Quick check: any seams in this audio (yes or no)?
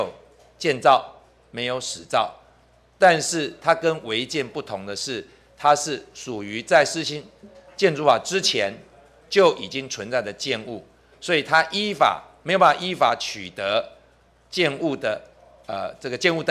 no